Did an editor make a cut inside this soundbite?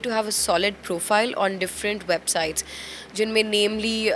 no; 0 cuts

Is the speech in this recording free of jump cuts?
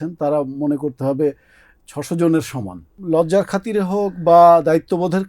no; 1 cut; at 2.9 s

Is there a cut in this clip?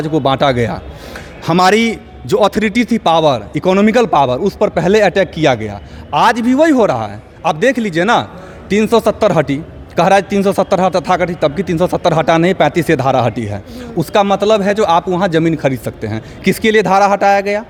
no; 0 cuts

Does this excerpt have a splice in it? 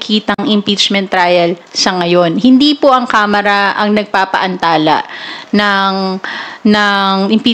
no; 0 cuts

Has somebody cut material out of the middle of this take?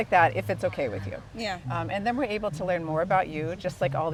no; 0 cuts

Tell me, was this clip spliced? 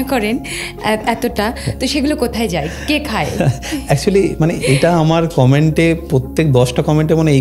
no; 0 cuts

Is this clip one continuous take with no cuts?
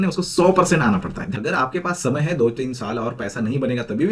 no; 1 cut; at 1.2 s

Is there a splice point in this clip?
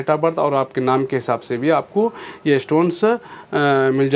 no; 0 cuts

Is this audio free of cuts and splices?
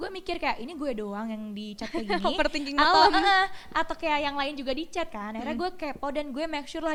yes; 0 cuts

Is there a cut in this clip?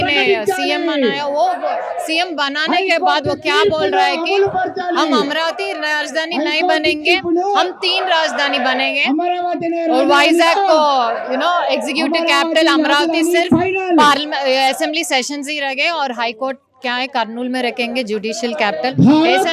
no; 0 cuts

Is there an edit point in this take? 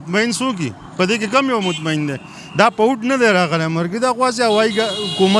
no; 0 cuts

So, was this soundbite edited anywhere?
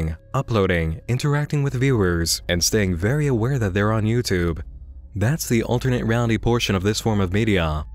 no; 0 cuts

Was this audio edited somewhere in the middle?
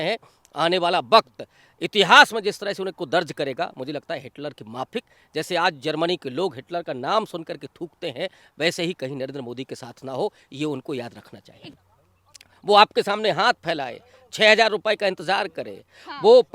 yes; 1 cut; at 11.6 s

